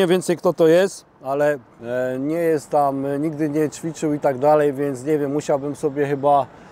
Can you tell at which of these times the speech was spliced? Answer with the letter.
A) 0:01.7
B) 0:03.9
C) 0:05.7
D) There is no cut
A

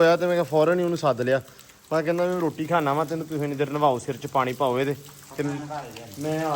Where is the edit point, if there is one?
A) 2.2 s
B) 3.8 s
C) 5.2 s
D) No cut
D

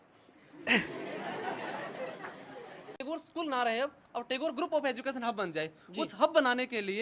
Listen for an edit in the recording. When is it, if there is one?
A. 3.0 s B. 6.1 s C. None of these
A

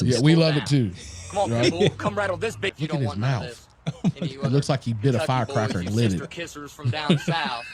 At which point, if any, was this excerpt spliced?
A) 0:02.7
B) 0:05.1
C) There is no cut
A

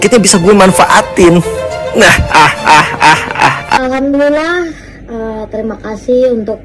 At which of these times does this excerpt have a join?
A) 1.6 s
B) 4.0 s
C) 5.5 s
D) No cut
B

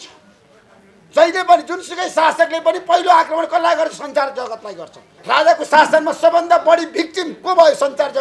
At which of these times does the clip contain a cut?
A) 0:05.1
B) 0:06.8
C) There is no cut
A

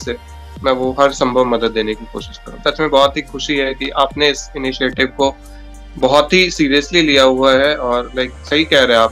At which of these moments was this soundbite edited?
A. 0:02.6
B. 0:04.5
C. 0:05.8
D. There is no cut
A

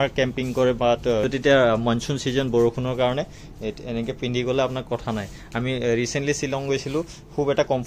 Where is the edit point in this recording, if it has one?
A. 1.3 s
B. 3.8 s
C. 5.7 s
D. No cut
A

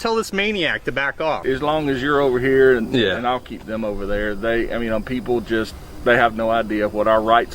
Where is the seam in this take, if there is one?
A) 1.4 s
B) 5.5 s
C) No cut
A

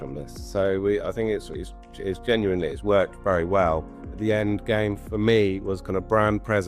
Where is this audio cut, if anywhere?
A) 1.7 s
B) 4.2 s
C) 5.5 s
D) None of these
B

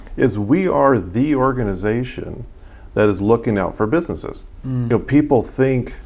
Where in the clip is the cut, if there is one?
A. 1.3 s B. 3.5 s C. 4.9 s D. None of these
C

